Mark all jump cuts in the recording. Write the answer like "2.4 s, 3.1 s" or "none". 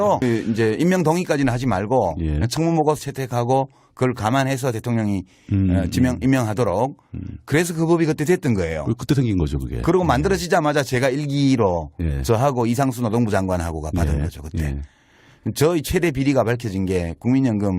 12.4 s

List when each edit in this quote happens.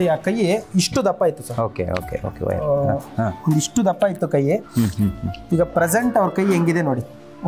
none

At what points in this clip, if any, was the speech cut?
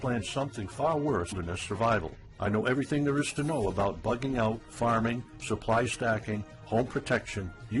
none

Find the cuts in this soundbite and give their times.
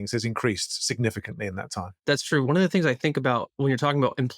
2.0 s

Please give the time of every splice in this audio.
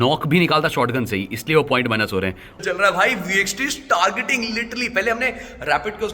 2.6 s

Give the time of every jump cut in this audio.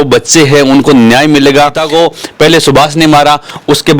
1.8 s

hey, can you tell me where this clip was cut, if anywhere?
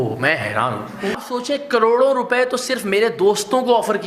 1.2 s

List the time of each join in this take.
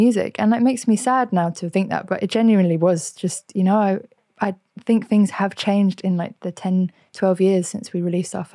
none

